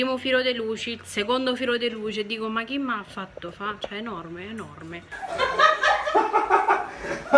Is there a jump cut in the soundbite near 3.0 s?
no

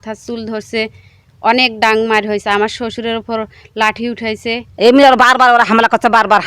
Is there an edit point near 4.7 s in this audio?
yes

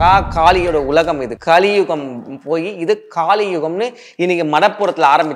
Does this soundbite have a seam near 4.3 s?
no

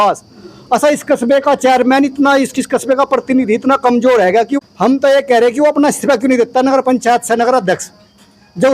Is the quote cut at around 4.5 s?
yes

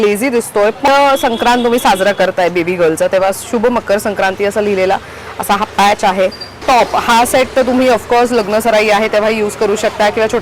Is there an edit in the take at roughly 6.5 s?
yes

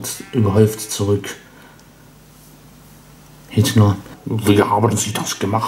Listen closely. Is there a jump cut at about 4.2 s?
yes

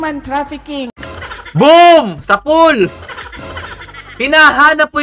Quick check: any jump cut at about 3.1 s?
no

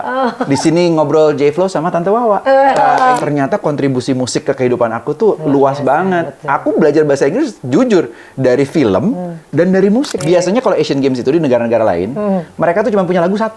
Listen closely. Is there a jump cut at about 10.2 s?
yes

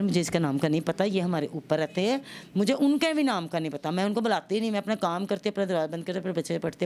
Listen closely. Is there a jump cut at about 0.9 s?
no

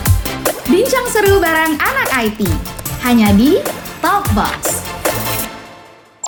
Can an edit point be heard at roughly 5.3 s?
no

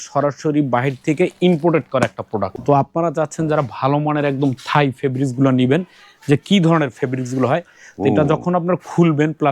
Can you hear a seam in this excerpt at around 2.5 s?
yes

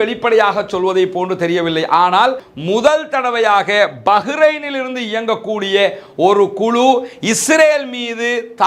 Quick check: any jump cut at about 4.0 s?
no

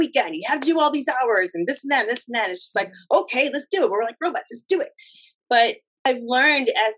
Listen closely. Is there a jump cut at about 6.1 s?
yes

